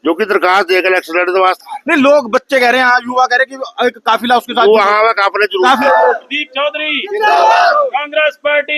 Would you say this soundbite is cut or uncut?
cut